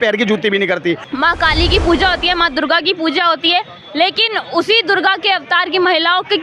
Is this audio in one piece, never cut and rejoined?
no; 1 cut; at 1.1 s

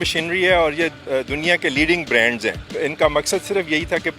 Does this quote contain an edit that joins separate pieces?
yes; 2 cuts; at 1.0 s, 2.7 s

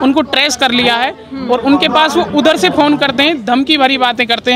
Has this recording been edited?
no; 0 cuts

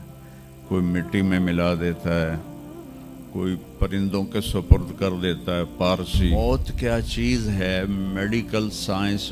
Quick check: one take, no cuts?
no; 1 cut; at 6.3 s

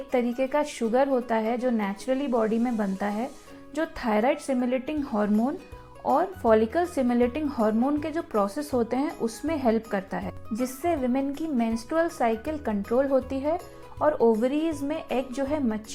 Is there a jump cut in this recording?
no; 0 cuts

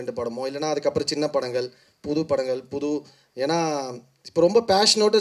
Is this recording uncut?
yes; 0 cuts

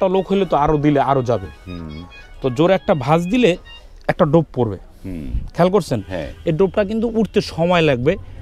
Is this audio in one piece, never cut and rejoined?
yes; 0 cuts

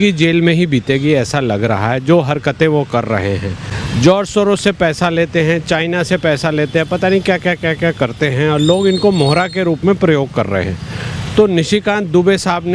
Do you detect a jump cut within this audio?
no; 0 cuts

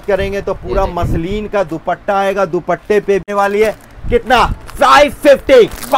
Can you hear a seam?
yes; 1 cut; at 3.2 s

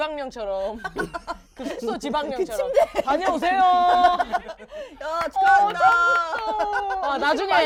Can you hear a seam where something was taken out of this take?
no; 0 cuts

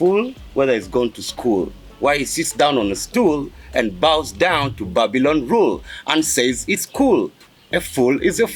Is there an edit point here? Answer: no; 0 cuts

